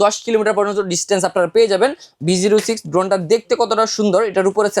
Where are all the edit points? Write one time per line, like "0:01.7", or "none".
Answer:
0:02.1